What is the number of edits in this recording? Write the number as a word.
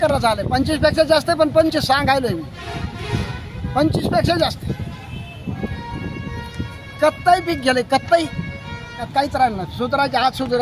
one